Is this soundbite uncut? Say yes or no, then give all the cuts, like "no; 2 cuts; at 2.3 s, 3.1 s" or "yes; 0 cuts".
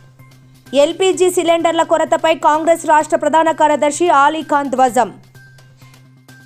no; 2 cuts; at 0.7 s, 5.1 s